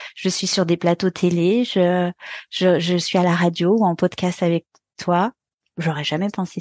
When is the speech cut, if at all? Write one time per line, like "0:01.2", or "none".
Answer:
none